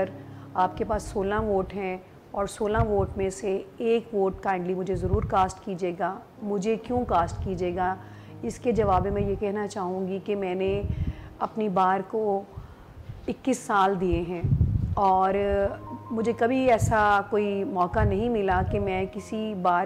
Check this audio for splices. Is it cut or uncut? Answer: uncut